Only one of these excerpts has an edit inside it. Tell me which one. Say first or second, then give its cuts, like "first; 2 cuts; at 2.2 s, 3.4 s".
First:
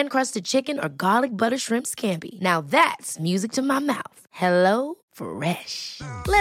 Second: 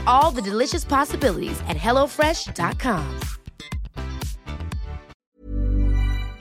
second; 1 cut; at 5.1 s